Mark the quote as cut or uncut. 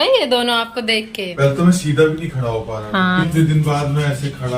cut